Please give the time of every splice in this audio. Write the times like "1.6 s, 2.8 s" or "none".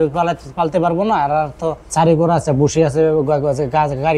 1.8 s